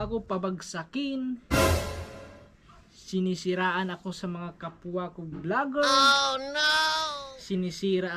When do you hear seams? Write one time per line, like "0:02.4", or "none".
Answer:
none